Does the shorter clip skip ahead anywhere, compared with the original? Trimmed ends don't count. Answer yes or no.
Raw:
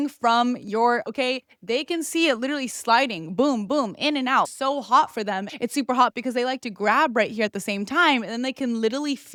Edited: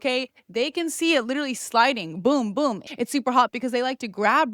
yes